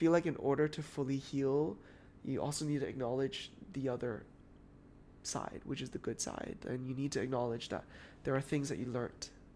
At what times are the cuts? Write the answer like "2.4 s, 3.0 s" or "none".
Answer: none